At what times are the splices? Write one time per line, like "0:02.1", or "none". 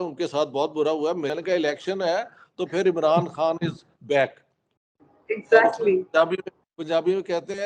0:01.3